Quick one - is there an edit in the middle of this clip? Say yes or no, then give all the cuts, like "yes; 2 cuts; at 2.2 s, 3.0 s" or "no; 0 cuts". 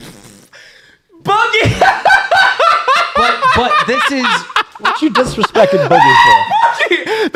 no; 0 cuts